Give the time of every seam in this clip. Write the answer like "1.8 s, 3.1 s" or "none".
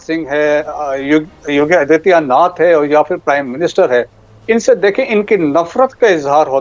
none